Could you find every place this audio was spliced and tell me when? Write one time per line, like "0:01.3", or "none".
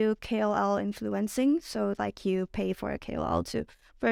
none